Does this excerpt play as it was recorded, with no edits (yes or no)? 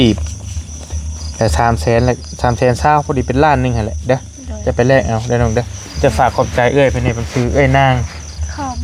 yes